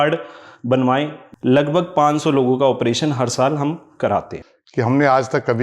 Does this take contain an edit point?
yes; 2 cuts; at 1.2 s, 4.4 s

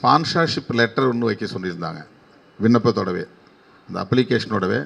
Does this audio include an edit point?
no; 0 cuts

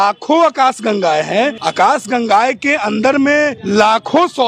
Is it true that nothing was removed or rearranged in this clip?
no; 2 cuts; at 1.6 s, 3.6 s

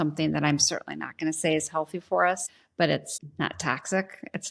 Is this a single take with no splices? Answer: no; 2 cuts; at 2.6 s, 3.2 s

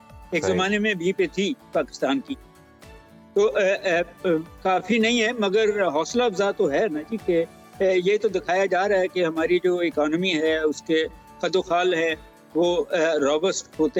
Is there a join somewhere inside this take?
no; 0 cuts

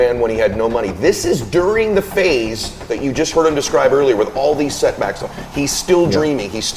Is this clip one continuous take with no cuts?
yes; 0 cuts

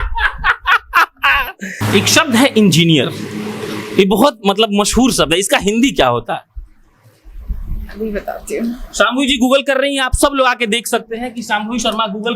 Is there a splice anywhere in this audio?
yes; 1 cut; at 1.6 s

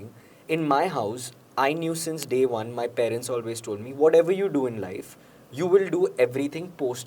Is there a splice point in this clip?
no; 0 cuts

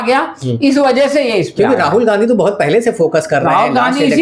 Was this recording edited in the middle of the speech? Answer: no; 0 cuts

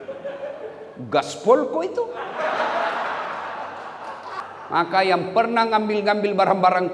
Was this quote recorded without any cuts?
no; 1 cut; at 4.4 s

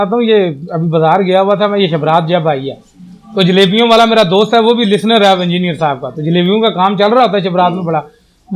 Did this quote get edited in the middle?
no; 0 cuts

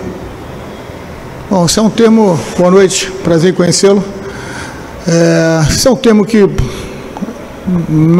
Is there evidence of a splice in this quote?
no; 0 cuts

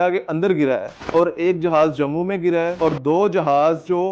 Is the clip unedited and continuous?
no; 2 cuts; at 0.9 s, 2.7 s

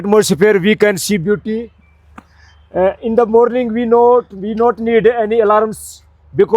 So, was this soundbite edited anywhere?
no; 0 cuts

